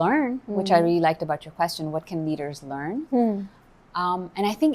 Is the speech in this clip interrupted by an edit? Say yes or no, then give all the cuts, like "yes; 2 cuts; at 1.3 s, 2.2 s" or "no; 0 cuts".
no; 0 cuts